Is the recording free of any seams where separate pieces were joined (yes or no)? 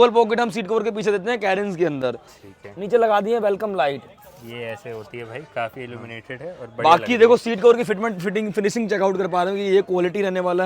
yes